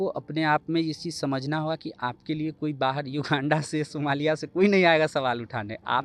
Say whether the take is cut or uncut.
uncut